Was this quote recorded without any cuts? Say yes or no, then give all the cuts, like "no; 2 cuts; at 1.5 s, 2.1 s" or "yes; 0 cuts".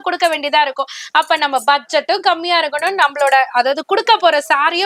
yes; 0 cuts